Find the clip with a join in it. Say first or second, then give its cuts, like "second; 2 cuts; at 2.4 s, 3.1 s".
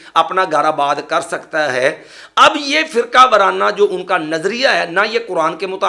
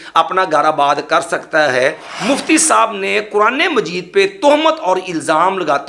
second; 1 cut; at 2.1 s